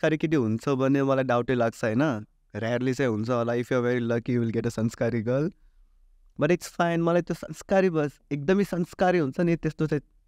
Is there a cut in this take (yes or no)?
no